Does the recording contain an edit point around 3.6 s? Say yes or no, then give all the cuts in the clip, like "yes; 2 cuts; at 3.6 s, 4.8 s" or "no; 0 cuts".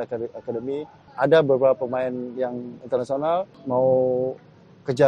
yes; 2 cuts; at 1.0 s, 3.6 s